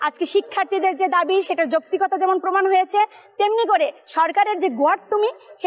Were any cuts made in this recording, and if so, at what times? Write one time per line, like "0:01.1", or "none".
none